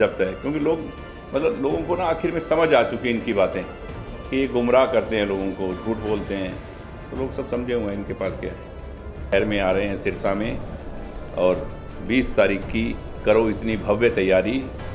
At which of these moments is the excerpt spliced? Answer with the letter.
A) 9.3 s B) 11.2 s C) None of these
A